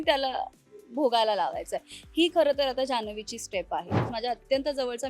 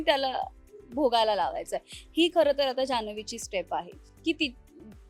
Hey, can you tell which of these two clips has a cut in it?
first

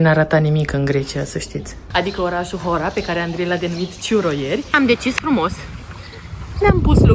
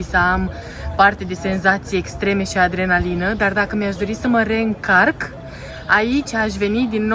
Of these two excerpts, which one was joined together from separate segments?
first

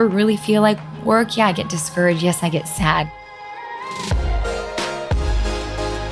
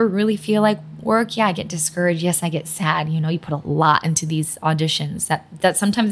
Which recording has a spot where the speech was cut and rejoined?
first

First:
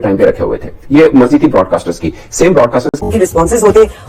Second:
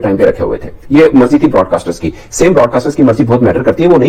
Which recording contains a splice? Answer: first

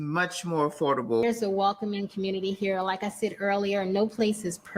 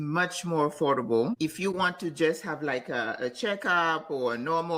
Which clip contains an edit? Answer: first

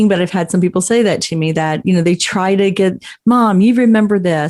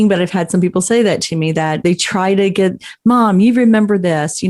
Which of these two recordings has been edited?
second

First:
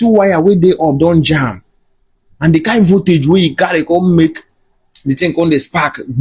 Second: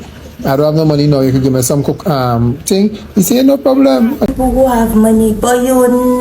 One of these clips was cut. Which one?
second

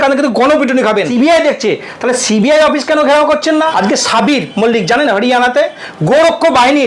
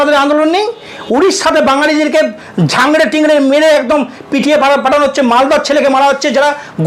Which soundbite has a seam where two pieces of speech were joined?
first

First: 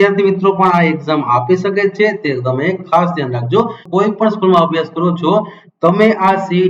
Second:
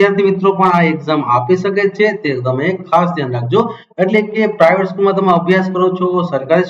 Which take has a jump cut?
first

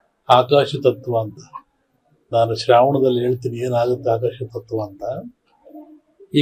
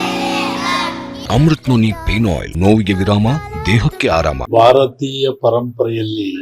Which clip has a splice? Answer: second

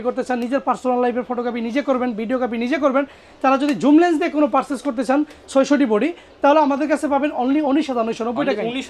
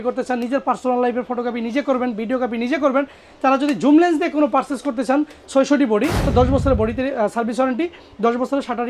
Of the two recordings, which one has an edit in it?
second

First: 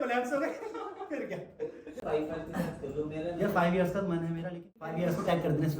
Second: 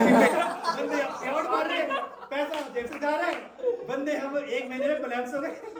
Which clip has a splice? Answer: first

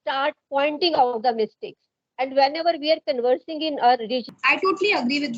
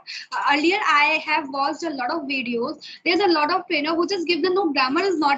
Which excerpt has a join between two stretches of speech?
first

